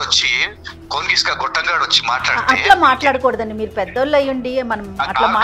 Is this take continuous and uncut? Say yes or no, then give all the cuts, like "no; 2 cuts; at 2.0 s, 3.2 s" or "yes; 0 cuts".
yes; 0 cuts